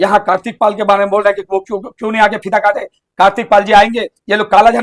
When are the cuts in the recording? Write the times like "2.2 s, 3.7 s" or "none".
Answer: none